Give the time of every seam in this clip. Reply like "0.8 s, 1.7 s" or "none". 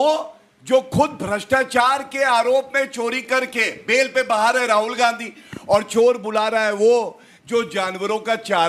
none